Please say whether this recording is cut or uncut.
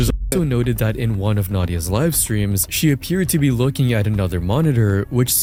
uncut